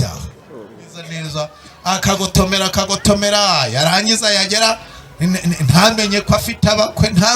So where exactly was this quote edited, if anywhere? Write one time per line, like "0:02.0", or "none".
0:01.2